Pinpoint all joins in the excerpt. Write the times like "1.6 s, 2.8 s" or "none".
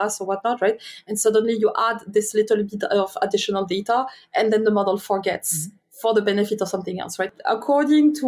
7.3 s